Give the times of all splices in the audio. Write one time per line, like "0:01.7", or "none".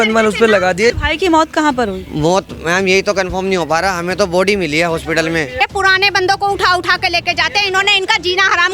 0:01.0
0:05.6

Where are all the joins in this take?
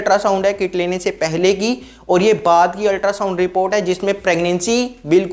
none

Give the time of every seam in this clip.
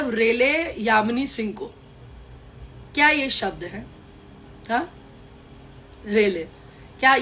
none

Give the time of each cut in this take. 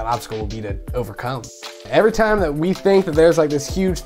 0:01.4

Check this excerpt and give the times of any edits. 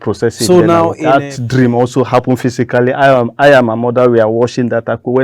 0:01.0

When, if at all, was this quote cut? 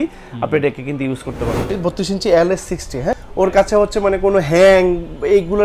0:01.6
0:03.1

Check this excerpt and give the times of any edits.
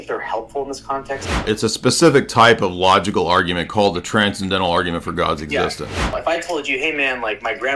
0:01.4
0:06.1

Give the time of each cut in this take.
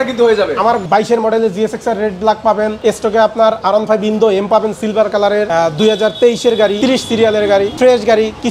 0:00.8
0:02.8
0:05.5
0:06.8
0:07.7

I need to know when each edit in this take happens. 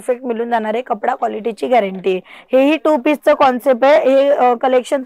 none

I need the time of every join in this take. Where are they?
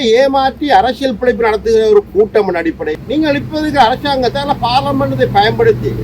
0:02.9

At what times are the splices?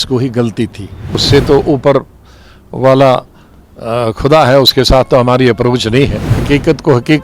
0:01.2
0:06.3

